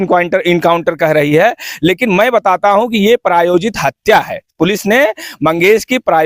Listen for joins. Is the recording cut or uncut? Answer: uncut